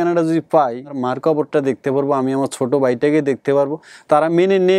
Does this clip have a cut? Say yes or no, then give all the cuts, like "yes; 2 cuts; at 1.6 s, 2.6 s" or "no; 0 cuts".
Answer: yes; 1 cut; at 0.9 s